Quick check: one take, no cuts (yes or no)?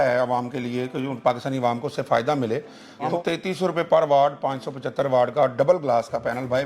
no